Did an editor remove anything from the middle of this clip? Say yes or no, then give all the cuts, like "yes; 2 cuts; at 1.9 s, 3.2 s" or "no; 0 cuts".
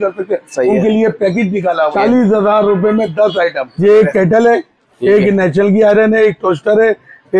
yes; 2 cuts; at 1.9 s, 3.7 s